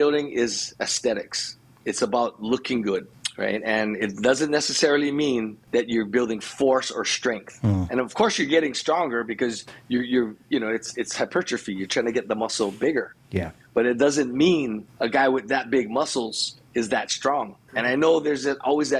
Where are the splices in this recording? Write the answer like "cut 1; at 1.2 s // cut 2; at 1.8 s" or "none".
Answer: cut 1; at 3.2 s // cut 2; at 5.6 s // cut 3; at 14.8 s